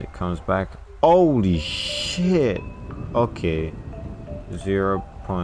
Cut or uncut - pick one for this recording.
uncut